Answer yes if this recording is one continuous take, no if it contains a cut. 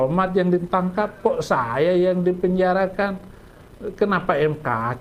yes